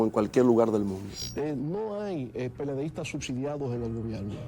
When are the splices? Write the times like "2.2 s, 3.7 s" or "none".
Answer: 1.2 s

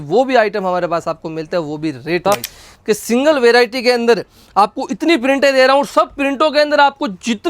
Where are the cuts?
2.2 s

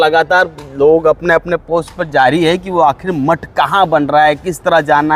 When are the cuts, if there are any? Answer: none

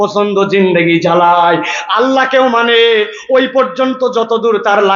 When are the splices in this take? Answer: none

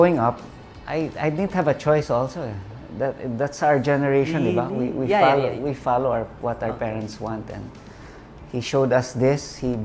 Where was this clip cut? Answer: none

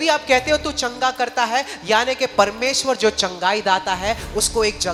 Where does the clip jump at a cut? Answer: none

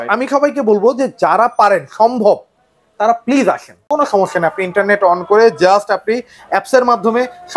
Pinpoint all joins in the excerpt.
3.7 s

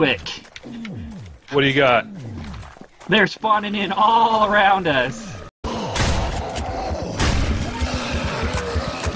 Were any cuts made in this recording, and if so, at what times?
5.6 s

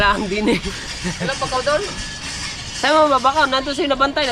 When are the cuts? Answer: none

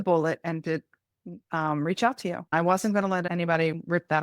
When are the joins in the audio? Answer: 2.5 s, 3.3 s

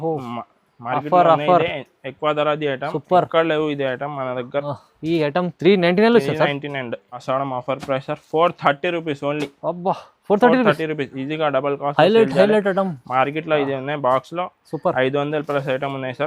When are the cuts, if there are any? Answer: 7.1 s

